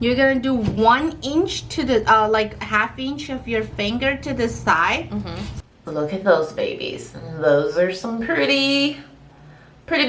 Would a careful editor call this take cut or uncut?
cut